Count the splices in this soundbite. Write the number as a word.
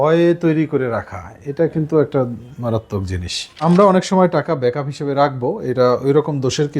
one